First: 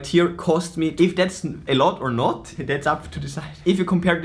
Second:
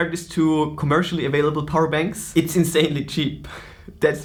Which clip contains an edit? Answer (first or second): first